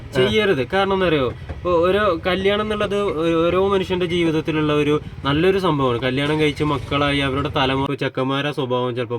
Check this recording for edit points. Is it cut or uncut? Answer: cut